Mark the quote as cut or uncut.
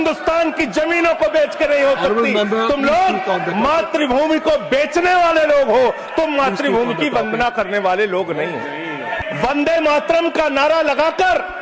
cut